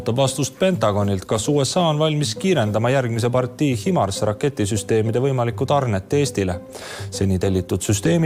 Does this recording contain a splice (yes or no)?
no